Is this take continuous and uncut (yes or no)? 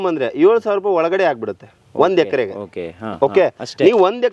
yes